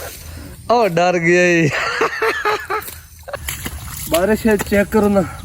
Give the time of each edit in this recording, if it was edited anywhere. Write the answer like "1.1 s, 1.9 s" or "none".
3.4 s